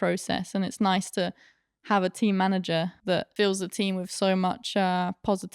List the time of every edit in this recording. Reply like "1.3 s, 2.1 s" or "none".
3.2 s